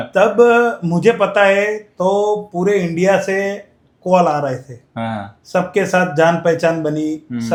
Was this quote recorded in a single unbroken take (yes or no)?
yes